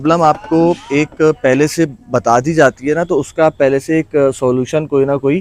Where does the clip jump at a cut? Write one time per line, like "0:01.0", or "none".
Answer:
none